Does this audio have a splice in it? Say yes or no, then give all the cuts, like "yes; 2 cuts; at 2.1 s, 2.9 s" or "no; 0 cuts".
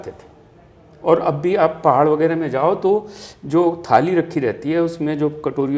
no; 0 cuts